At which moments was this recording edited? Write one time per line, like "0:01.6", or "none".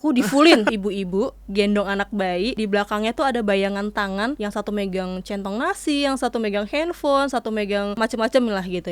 0:00.7
0:02.5
0:04.4
0:07.9